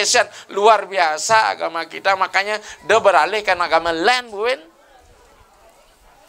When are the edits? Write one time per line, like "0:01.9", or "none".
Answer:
none